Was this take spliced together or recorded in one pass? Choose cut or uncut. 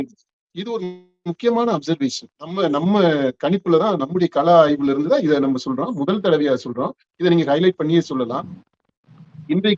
uncut